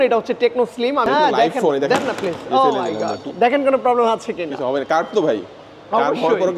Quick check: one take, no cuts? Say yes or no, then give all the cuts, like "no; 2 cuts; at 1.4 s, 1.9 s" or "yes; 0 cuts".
no; 1 cut; at 1.0 s